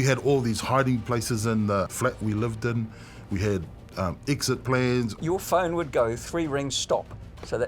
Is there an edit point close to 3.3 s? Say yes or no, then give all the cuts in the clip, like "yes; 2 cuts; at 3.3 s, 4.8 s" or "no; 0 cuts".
no; 2 cuts; at 1.9 s, 5.2 s